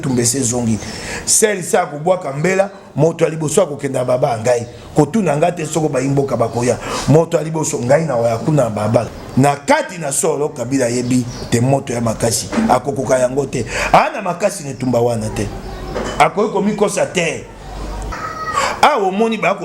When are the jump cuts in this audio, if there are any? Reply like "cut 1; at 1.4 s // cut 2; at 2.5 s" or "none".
cut 1; at 9.2 s // cut 2; at 18.1 s